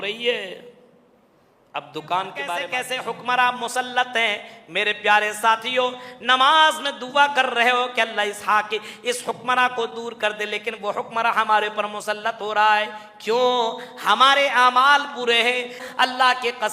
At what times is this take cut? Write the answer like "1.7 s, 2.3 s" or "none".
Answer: 2.7 s, 15.8 s